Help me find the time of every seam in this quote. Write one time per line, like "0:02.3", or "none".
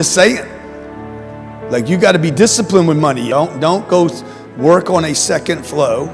0:03.2

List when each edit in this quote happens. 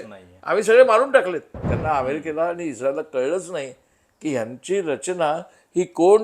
0:01.7

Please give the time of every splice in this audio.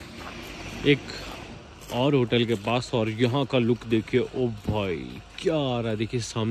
none

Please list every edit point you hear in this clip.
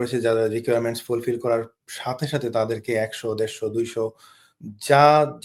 none

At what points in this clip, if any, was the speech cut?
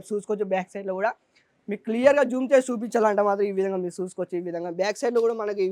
none

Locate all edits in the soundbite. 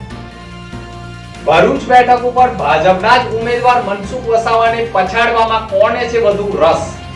0:01.3

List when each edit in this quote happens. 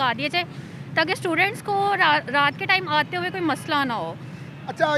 none

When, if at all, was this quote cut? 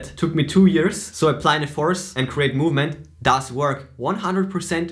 0:01.0

